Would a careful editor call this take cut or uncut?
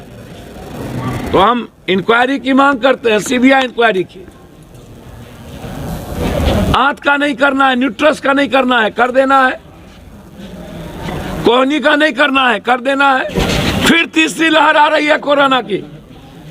cut